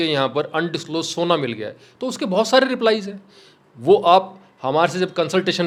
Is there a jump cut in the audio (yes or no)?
no